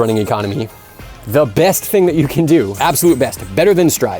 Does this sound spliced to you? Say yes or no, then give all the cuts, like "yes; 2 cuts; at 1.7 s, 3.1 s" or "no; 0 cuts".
yes; 1 cut; at 2.7 s